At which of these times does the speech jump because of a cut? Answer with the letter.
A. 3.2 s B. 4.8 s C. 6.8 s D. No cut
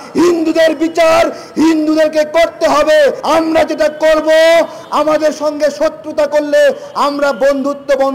A